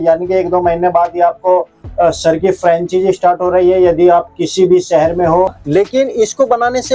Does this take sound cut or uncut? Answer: cut